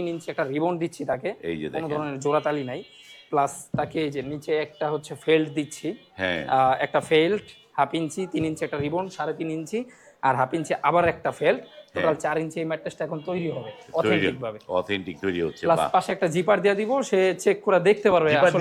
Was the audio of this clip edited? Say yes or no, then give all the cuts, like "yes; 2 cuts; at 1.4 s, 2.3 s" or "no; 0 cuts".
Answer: no; 0 cuts